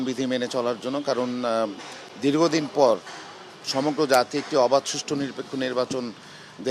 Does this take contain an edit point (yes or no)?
no